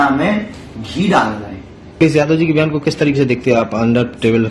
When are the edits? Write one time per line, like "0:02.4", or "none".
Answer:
0:02.0